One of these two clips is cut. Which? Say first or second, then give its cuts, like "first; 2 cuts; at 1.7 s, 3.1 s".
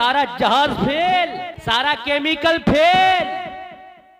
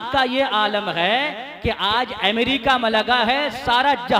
first; 1 cut; at 1.5 s